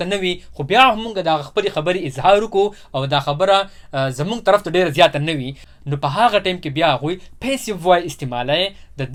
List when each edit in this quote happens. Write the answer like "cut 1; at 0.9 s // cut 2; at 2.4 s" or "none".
none